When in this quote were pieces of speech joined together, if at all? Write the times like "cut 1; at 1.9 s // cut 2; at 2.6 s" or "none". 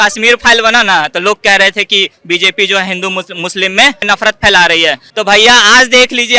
cut 1; at 4.0 s // cut 2; at 5.0 s